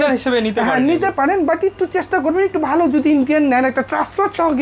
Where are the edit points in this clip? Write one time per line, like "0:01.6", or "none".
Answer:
none